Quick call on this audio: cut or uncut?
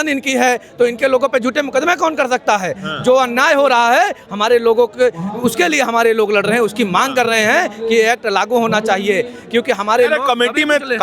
uncut